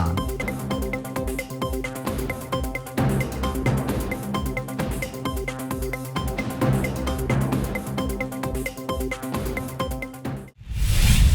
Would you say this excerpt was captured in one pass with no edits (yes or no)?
no